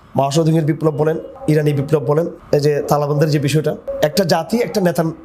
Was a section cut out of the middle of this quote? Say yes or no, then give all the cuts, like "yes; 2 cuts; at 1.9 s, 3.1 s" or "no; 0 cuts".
yes; 3 cuts; at 1.3 s, 2.4 s, 3.9 s